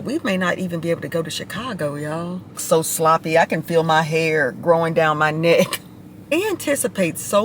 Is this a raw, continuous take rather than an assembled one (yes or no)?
no